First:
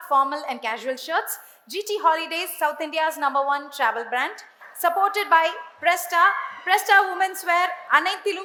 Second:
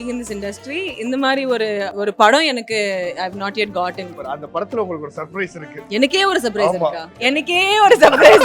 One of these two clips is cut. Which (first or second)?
second